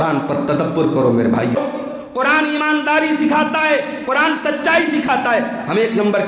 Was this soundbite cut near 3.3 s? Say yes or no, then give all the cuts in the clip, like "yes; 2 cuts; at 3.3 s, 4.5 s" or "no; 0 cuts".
no; 1 cut; at 1.6 s